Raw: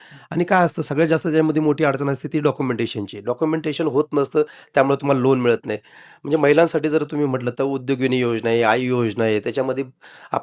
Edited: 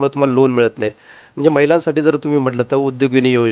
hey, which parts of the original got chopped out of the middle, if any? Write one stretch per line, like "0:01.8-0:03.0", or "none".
none